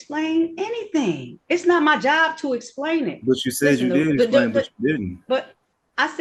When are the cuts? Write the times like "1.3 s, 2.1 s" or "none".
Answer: none